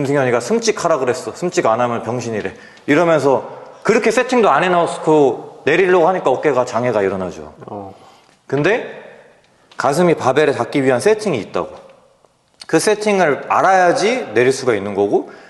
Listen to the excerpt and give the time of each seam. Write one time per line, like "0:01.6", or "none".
none